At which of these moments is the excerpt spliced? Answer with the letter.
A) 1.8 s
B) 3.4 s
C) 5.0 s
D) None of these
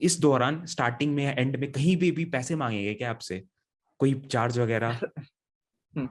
D